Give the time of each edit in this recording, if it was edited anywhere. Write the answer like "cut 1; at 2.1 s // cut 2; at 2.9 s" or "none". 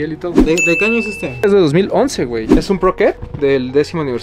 cut 1; at 2.4 s